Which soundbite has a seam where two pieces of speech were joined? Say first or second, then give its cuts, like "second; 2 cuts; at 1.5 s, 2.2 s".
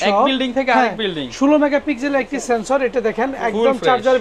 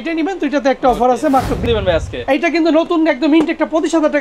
second; 1 cut; at 1.6 s